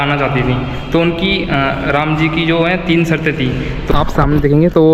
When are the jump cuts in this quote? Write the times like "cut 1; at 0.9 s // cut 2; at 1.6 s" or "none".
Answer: cut 1; at 3.9 s